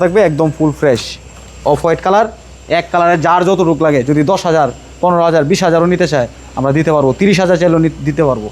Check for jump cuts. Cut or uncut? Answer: uncut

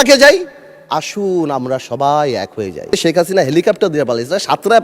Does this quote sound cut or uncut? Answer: cut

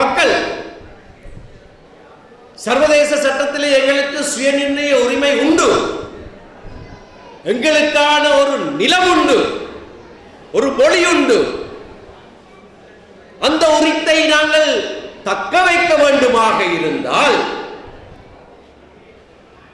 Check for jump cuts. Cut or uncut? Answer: uncut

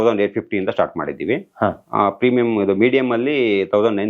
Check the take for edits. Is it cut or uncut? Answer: uncut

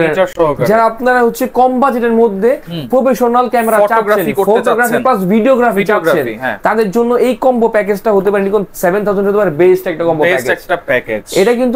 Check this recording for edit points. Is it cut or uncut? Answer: uncut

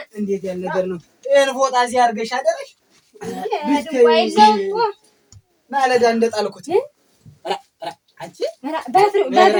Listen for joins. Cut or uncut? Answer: uncut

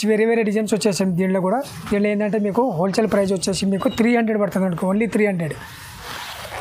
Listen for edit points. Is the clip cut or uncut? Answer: uncut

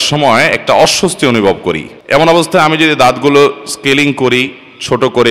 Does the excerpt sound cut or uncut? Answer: cut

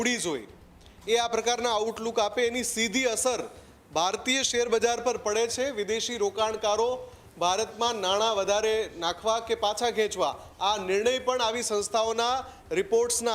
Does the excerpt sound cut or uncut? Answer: uncut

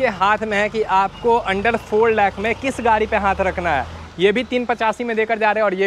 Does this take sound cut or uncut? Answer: uncut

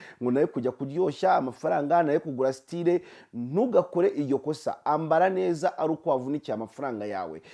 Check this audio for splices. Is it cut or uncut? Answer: uncut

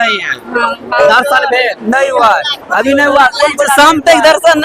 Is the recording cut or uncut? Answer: cut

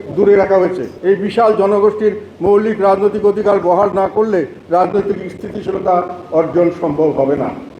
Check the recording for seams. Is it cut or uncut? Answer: uncut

